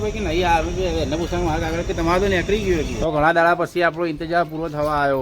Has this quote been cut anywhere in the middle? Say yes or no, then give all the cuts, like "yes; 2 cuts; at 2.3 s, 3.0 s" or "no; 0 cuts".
yes; 1 cut; at 2.9 s